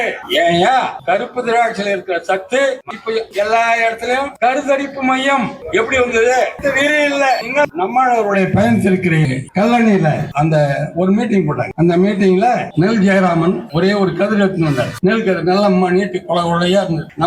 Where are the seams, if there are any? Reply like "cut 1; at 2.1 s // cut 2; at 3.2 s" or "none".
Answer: cut 1; at 2.9 s // cut 2; at 7.7 s // cut 3; at 9.3 s

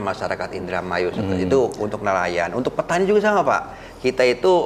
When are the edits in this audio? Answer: none

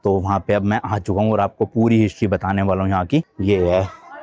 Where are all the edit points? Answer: cut 1; at 3.2 s

